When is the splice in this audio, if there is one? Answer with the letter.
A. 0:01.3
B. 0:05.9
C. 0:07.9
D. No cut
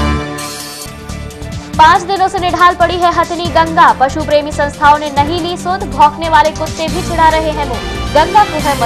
A